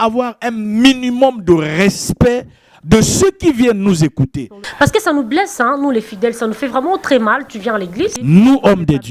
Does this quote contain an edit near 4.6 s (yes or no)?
yes